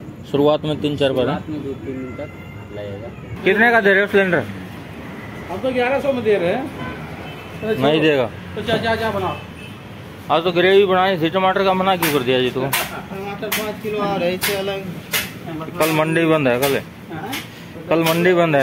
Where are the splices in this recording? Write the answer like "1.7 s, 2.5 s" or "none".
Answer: 3.3 s